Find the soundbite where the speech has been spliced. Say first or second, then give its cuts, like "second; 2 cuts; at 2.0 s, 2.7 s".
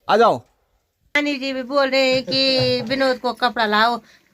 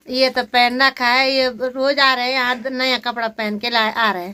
first; 1 cut; at 1.1 s